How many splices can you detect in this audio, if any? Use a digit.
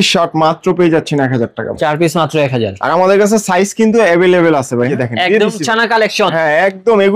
1